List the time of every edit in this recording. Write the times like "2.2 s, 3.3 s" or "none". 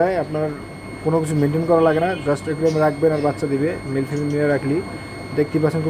none